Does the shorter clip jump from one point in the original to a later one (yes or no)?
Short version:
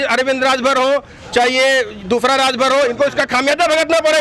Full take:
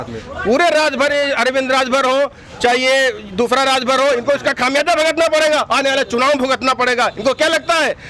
no